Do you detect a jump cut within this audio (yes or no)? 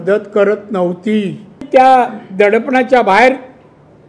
yes